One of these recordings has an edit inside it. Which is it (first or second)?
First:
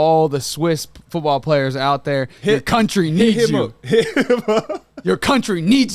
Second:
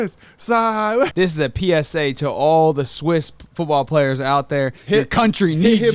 second